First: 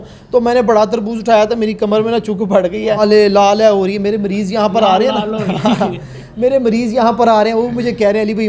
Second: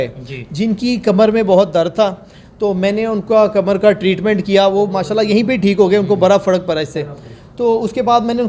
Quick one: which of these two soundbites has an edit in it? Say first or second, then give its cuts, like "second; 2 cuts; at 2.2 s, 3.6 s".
first; 1 cut; at 3.0 s